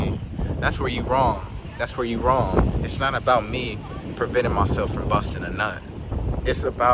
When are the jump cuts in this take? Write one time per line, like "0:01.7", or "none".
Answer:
0:01.6
0:06.1